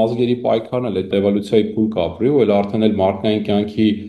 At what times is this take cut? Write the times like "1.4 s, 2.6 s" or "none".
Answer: 1.1 s